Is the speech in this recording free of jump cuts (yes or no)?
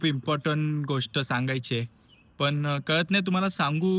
yes